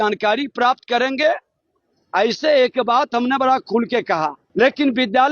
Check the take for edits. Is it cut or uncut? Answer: cut